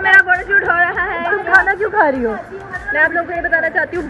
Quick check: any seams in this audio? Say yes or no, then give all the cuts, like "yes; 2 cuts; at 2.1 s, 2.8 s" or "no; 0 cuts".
yes; 1 cut; at 2.8 s